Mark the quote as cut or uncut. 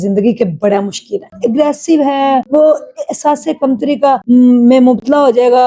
cut